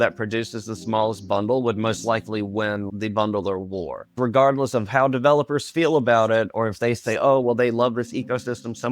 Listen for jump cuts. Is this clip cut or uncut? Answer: cut